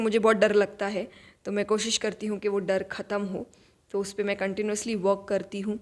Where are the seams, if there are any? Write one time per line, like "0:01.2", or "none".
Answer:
none